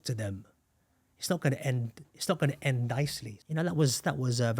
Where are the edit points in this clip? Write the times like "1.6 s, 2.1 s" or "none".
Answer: 3.3 s